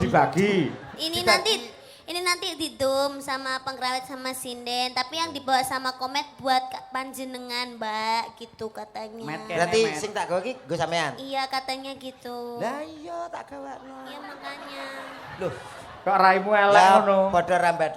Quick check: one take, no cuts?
yes; 0 cuts

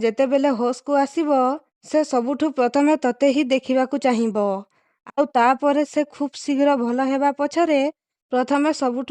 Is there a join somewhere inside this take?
yes; 1 cut; at 1.7 s

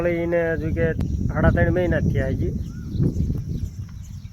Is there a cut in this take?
yes; 1 cut; at 1.0 s

